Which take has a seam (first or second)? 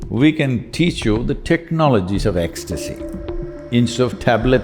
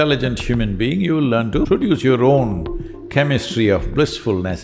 second